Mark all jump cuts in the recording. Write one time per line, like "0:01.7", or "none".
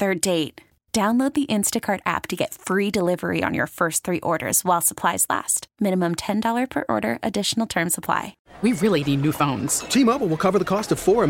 0:08.4